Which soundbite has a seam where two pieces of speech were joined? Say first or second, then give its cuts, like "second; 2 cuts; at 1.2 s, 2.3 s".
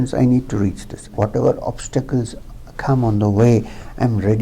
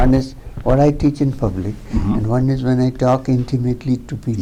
first; 1 cut; at 1.0 s